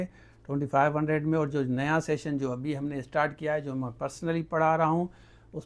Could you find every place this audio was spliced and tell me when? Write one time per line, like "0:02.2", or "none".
none